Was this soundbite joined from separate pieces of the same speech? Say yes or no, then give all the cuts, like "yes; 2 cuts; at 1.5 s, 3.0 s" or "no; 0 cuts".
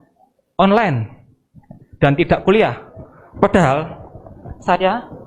no; 0 cuts